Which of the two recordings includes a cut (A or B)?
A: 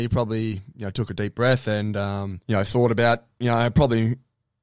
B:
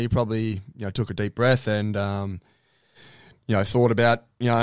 A